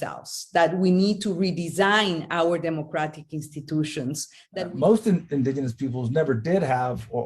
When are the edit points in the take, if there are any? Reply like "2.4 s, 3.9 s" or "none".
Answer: 4.3 s